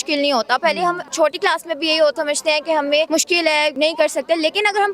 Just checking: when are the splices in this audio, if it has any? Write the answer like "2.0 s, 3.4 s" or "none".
1.1 s, 2.2 s, 3.5 s